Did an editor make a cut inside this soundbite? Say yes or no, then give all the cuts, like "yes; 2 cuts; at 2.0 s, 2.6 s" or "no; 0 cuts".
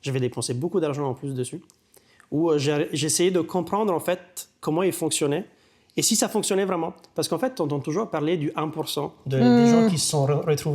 no; 0 cuts